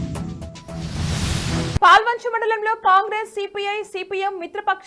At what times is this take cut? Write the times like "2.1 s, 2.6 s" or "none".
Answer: none